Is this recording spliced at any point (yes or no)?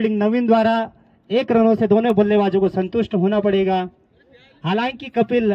no